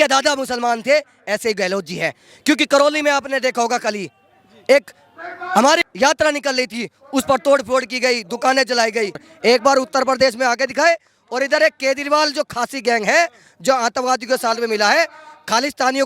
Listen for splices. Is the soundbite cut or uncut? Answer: cut